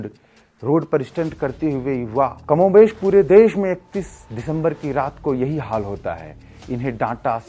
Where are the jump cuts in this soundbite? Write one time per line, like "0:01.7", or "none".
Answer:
0:02.4